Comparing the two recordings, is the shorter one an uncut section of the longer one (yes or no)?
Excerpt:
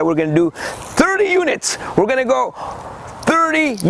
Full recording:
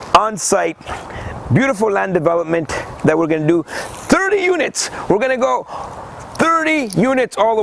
yes